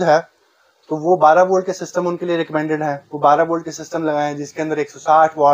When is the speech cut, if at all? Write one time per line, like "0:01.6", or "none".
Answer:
none